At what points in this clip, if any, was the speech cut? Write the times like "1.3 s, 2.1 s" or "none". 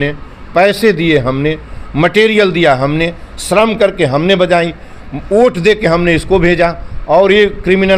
none